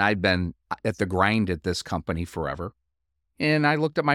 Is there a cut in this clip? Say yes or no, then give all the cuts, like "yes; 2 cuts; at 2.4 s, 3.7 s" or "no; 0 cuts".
no; 0 cuts